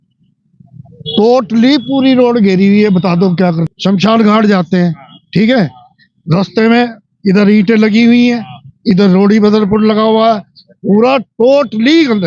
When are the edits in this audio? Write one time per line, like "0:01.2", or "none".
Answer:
0:03.6